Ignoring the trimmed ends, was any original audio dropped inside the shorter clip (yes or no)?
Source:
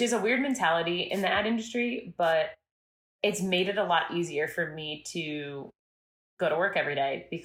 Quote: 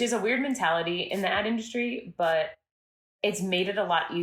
no